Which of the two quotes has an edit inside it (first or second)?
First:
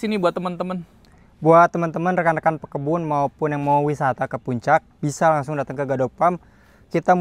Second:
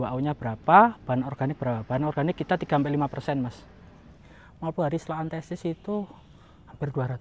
second